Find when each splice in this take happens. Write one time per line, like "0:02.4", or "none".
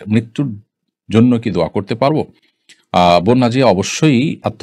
none